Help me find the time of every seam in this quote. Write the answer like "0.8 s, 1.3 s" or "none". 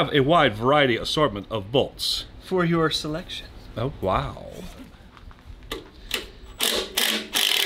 5.0 s

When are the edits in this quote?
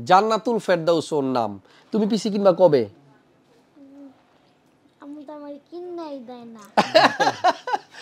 none

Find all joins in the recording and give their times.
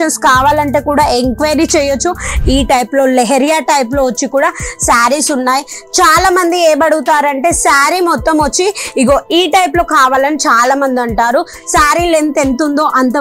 2.4 s

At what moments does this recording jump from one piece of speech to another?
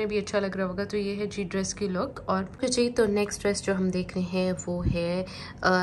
2.5 s

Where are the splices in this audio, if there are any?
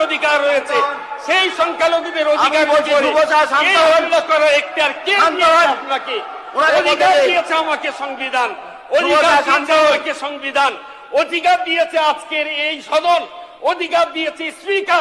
none

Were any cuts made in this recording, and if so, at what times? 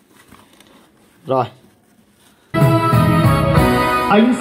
2.4 s

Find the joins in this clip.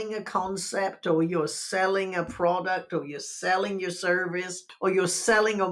4.6 s

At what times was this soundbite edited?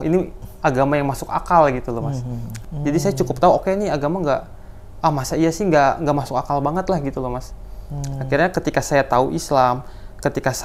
2.6 s

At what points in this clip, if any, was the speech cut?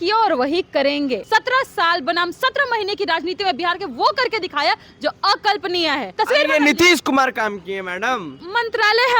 1.2 s, 6.1 s, 8.3 s

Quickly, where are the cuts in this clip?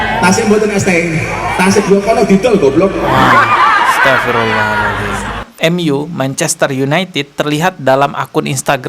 5.6 s

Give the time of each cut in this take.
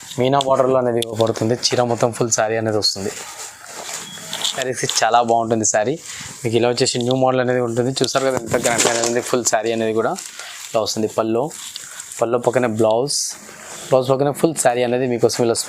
4.6 s

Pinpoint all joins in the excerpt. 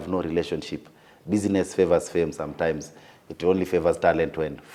none

